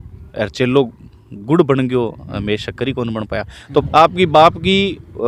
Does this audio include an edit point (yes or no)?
yes